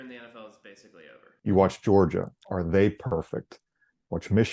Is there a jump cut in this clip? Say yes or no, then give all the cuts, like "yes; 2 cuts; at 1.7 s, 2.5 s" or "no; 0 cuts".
yes; 1 cut; at 1.3 s